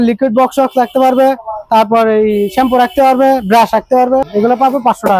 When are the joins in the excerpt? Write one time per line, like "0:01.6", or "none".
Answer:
0:04.3

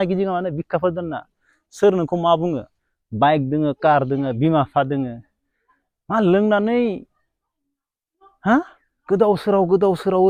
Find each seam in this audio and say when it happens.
none

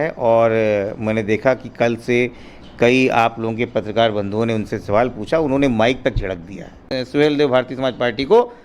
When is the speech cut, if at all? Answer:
0:06.8

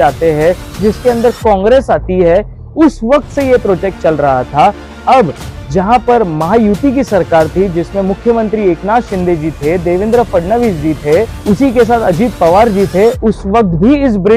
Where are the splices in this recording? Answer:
none

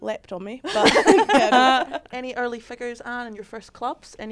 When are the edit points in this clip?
0:02.1

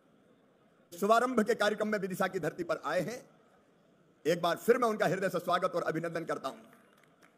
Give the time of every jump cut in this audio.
0:00.9

